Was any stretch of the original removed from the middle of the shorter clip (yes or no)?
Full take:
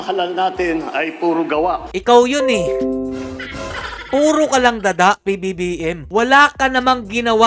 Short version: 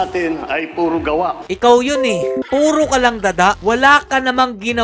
yes